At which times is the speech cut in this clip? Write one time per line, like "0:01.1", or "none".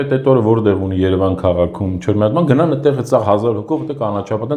none